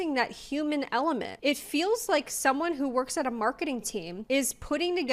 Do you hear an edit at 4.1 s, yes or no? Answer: yes